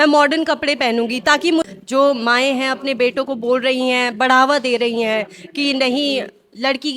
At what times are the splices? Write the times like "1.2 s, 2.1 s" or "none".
1.7 s

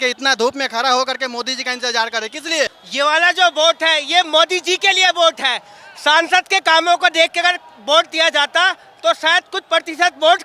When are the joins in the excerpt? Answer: 2.8 s

